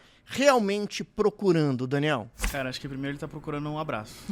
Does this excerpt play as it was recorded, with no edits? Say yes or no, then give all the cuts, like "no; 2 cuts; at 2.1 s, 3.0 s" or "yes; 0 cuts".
no; 1 cut; at 2.4 s